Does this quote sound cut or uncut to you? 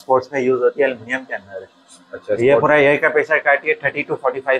uncut